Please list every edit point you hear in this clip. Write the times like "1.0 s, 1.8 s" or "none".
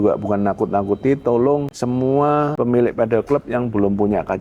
1.7 s, 2.5 s